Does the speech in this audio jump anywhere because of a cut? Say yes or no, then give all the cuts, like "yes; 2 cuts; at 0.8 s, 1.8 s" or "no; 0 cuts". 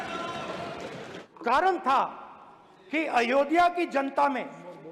yes; 1 cut; at 1.2 s